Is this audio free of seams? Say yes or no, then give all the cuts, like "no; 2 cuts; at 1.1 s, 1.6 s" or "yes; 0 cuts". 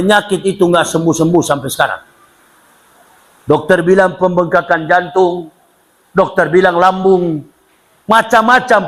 yes; 0 cuts